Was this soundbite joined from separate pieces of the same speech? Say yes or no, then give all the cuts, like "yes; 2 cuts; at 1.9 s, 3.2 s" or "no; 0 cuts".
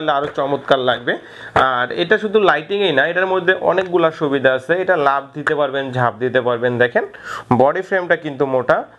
no; 0 cuts